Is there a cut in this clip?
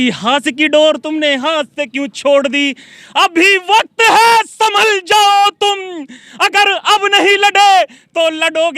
no; 0 cuts

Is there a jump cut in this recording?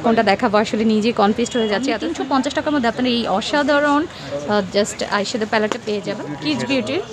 yes; 2 cuts; at 1.9 s, 6.2 s

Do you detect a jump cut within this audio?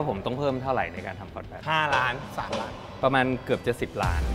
no; 0 cuts

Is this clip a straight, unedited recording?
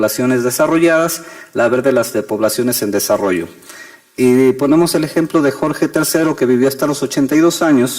yes; 0 cuts

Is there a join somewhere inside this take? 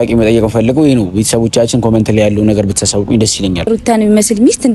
yes; 1 cut; at 3.7 s

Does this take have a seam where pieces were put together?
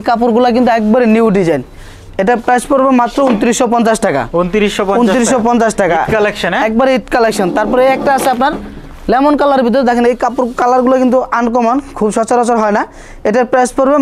no; 0 cuts

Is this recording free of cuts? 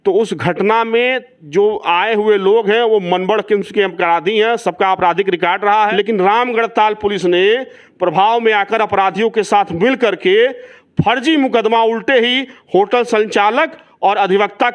no; 1 cut; at 5.9 s

